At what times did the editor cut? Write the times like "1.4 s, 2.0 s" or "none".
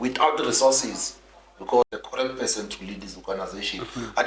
1.8 s